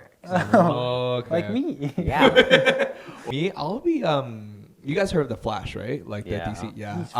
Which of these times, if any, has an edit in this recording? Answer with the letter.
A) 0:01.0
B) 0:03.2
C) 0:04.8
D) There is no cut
B